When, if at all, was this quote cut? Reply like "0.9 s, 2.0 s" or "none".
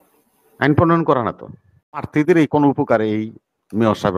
2.1 s